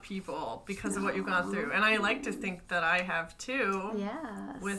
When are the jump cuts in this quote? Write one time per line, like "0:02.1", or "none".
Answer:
none